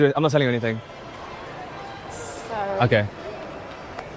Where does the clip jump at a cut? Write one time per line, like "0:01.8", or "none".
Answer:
none